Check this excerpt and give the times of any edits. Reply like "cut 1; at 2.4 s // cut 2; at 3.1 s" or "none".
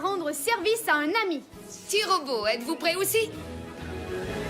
cut 1; at 3.4 s